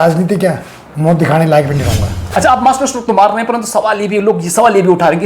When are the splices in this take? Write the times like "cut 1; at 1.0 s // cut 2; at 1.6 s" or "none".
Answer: cut 1; at 2.1 s